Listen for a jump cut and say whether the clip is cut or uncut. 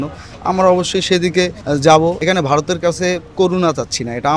cut